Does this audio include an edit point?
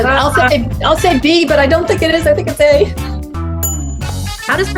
yes; 1 cut; at 3.4 s

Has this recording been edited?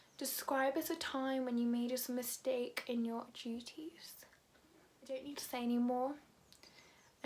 yes; 1 cut; at 5.2 s

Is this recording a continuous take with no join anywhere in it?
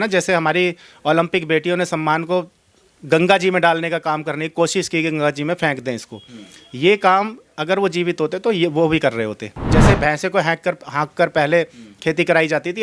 no; 1 cut; at 9.7 s

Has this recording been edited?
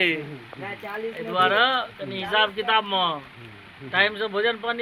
no; 0 cuts

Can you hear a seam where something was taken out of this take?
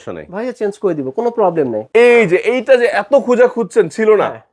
yes; 1 cut; at 1.8 s

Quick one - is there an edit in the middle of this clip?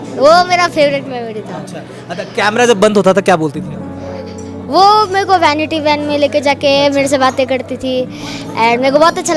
no; 0 cuts

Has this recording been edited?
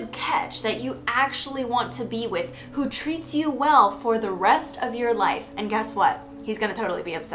no; 0 cuts

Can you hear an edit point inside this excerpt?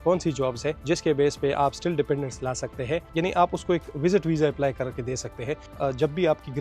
yes; 3 cuts; at 0.8 s, 3.1 s, 5.7 s

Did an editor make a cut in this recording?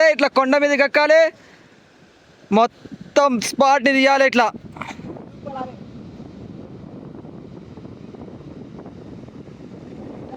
no; 0 cuts

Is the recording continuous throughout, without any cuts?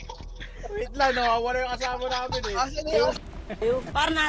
no; 1 cut; at 3.2 s

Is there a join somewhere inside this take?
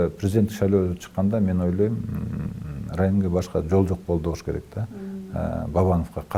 no; 0 cuts

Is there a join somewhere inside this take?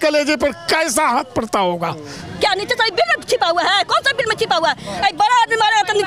yes; 1 cut; at 2.2 s

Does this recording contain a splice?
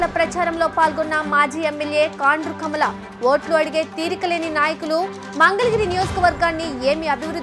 no; 0 cuts

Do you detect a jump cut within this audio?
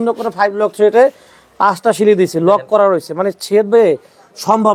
no; 0 cuts

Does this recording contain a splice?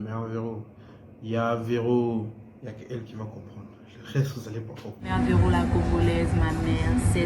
yes; 1 cut; at 5.1 s

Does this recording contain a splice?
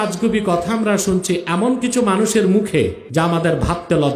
yes; 1 cut; at 3.0 s

